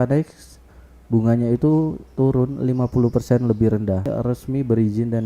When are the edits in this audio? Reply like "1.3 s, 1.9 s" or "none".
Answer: 4.1 s